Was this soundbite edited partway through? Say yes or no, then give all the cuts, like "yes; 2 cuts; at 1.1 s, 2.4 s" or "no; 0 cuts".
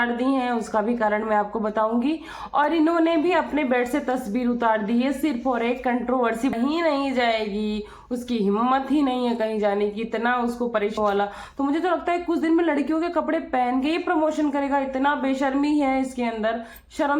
yes; 2 cuts; at 6.5 s, 11.0 s